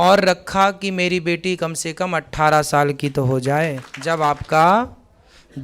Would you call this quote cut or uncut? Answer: cut